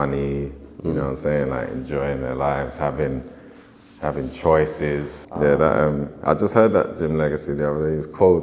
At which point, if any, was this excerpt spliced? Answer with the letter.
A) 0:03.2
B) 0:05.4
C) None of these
B